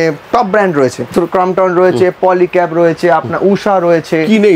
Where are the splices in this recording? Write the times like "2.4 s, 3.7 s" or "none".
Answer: 1.1 s